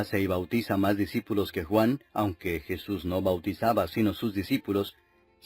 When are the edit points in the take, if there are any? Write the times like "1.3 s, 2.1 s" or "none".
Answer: 3.9 s